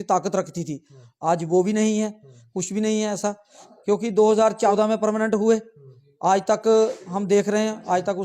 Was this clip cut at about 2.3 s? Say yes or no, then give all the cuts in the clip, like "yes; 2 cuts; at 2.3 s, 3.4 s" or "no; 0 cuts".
no; 1 cut; at 4.7 s